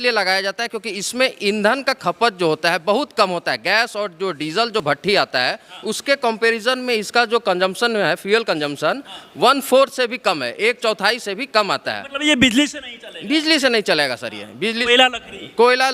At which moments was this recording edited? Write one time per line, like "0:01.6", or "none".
none